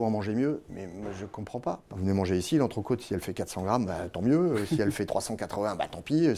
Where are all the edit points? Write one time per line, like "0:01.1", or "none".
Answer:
0:01.9